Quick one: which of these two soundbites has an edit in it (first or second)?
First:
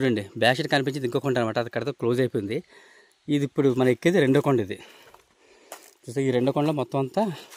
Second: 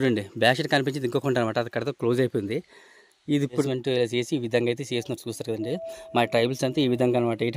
second